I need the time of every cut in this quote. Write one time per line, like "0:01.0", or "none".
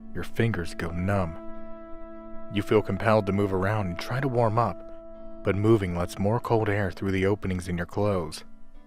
0:02.6